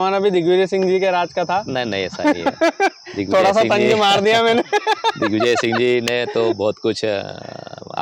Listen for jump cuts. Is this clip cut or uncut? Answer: uncut